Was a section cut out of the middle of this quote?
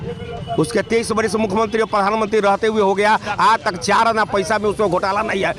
no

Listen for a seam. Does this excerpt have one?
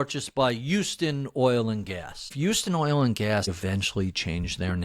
yes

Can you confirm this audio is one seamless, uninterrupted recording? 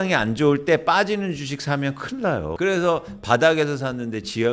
no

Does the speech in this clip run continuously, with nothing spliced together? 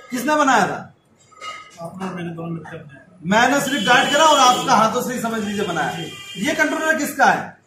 yes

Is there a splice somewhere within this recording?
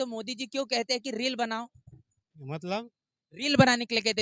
no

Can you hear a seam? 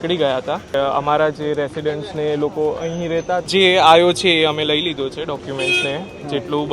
yes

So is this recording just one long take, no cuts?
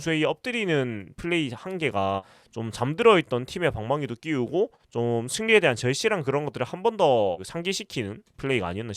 yes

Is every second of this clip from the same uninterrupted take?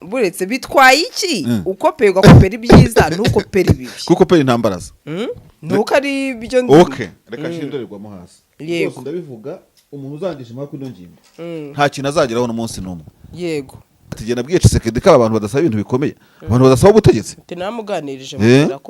no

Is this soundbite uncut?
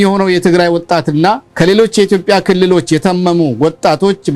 no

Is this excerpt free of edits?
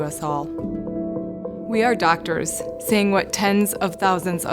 yes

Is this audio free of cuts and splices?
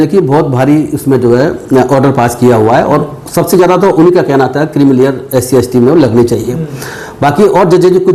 yes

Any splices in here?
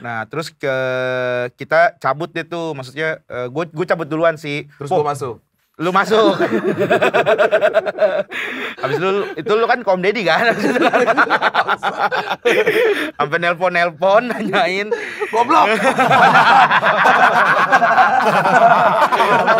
no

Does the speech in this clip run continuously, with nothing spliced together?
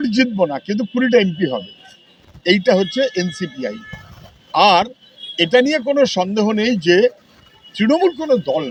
yes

